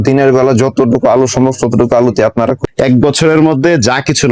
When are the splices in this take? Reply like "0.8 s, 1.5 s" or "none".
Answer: 2.6 s